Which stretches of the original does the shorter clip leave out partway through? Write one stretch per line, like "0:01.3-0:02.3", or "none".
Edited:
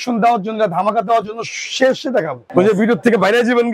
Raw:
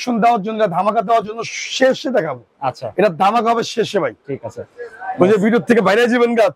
0:02.4-0:05.0